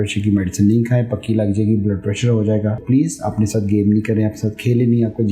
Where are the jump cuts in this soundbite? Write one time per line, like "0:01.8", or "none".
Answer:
0:02.8